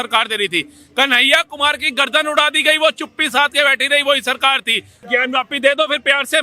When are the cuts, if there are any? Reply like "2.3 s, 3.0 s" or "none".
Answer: 5.0 s